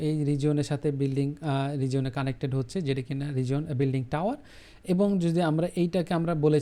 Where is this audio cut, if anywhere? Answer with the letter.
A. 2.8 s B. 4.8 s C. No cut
C